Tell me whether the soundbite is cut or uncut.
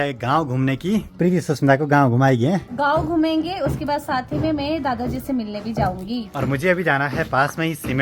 uncut